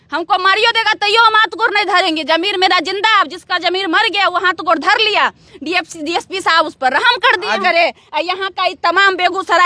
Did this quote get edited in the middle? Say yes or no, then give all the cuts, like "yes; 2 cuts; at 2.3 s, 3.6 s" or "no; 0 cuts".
yes; 1 cut; at 7.6 s